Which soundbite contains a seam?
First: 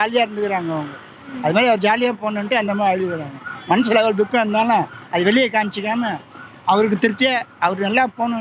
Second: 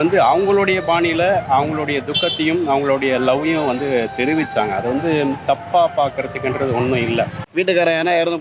second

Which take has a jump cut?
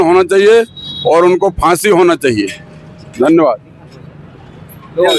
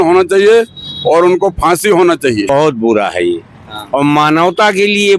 second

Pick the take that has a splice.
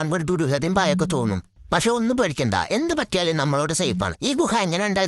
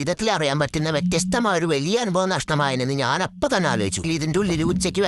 second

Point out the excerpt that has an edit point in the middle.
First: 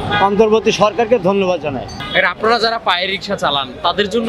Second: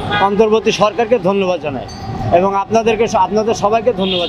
first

